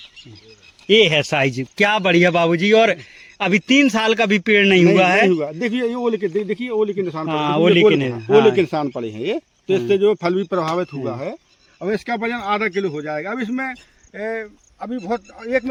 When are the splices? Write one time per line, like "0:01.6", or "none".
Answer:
none